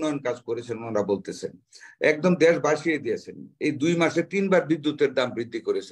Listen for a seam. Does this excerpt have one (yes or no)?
no